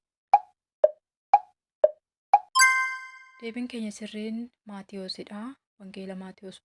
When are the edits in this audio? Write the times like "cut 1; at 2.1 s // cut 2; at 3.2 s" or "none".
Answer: none